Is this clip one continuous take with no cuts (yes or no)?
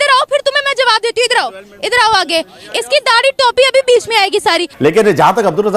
no